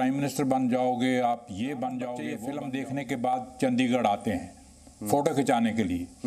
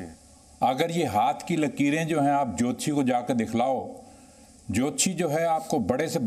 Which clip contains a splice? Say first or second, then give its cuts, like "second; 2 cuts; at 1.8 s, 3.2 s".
first; 1 cut; at 2.3 s